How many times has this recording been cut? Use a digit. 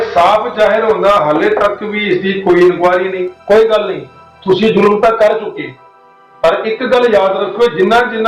1